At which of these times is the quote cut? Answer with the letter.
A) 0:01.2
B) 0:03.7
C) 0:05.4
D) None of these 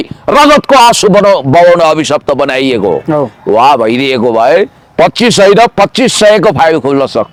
D